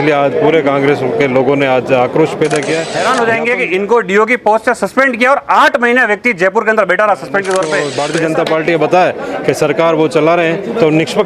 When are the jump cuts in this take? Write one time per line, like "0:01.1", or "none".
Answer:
0:02.9
0:08.0